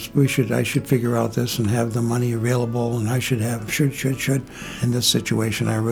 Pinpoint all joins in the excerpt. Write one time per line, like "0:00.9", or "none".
0:04.6